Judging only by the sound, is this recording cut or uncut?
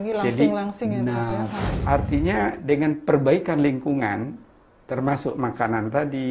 cut